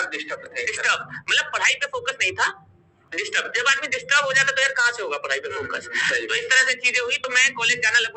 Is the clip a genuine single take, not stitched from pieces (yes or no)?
yes